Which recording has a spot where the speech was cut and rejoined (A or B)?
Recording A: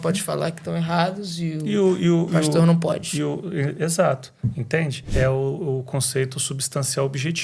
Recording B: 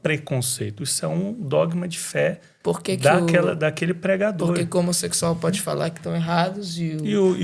A